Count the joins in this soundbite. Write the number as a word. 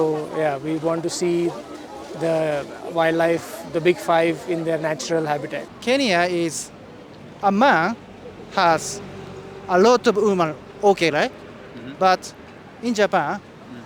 one